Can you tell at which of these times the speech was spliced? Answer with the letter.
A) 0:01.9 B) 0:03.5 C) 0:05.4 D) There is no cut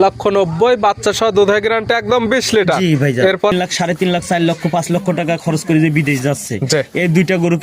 B